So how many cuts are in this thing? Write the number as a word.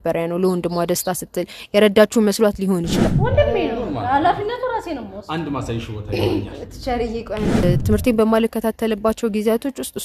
two